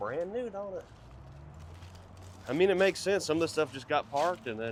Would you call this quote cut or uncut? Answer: uncut